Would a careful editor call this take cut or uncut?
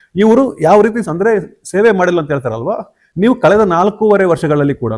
uncut